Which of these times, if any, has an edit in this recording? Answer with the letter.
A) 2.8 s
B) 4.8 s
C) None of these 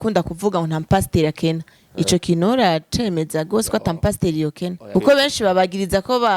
B